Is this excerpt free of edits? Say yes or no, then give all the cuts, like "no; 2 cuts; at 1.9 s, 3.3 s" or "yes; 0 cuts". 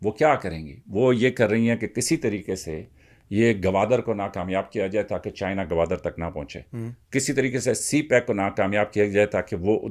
yes; 0 cuts